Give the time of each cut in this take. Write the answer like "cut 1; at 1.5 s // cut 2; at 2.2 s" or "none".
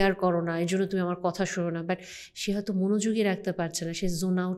none